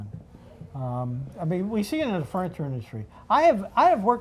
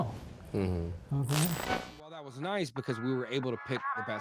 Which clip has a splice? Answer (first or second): second